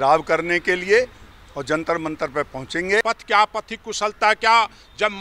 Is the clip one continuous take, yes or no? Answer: no